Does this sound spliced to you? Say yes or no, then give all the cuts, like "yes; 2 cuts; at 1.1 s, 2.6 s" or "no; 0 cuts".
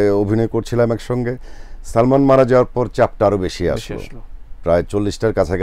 no; 0 cuts